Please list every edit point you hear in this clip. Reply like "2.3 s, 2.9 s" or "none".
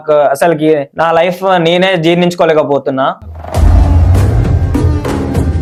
none